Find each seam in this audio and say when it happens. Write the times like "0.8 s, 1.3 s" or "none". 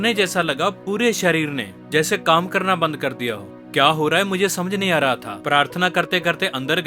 none